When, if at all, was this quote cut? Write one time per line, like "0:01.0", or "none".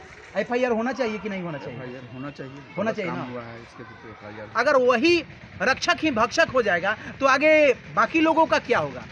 0:04.5